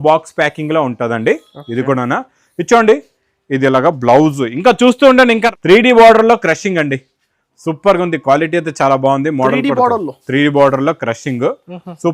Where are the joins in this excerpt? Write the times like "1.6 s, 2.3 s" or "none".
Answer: 5.5 s